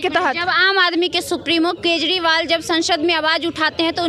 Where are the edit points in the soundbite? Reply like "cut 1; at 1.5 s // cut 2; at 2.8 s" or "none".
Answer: none